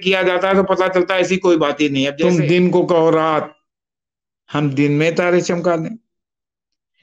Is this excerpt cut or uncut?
cut